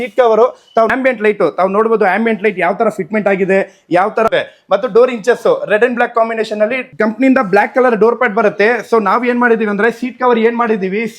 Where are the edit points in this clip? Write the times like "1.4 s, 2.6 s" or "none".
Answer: 0.9 s, 4.3 s, 6.8 s